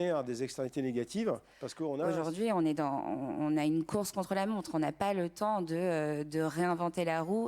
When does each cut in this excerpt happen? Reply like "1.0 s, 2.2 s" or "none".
2.0 s